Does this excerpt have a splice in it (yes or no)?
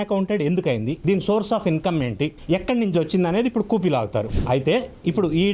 yes